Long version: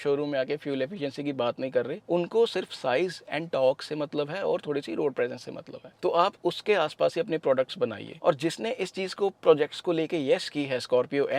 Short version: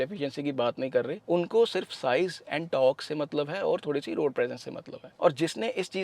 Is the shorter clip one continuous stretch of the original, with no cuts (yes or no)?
no